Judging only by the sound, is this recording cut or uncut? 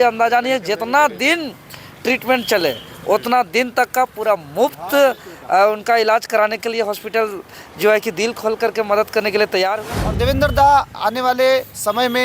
cut